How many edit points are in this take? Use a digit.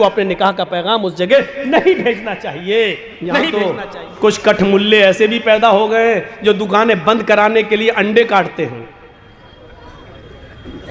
1